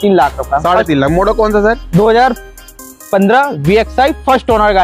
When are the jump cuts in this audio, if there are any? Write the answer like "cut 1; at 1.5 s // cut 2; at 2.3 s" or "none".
none